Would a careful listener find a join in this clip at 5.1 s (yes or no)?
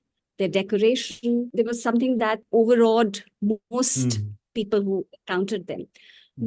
no